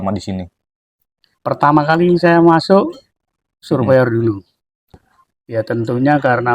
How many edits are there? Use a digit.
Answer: 1